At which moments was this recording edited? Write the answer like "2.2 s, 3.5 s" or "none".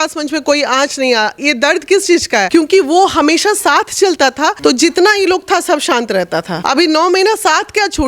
2.5 s, 4.6 s, 6.5 s